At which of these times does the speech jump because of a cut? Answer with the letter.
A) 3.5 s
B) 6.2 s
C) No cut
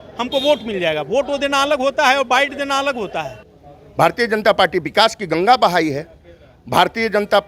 A